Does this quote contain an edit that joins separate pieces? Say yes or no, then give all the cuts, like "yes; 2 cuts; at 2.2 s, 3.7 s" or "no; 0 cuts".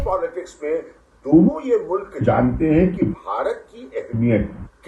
no; 0 cuts